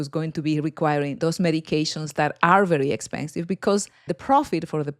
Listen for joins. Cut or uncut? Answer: cut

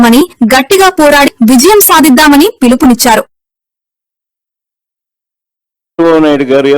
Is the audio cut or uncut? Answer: cut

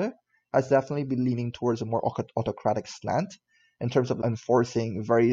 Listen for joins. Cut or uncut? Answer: cut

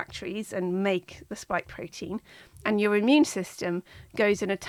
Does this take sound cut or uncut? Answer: uncut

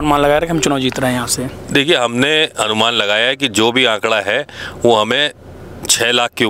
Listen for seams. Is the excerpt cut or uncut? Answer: uncut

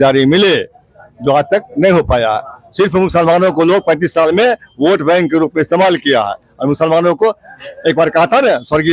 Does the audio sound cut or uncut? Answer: uncut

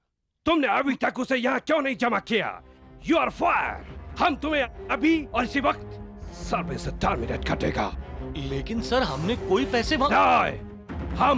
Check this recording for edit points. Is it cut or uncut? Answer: uncut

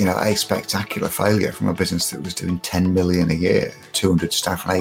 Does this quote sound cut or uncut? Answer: cut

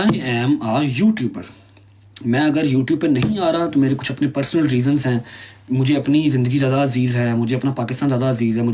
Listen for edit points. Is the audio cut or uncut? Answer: uncut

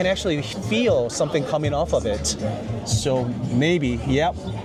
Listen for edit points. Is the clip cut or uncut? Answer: uncut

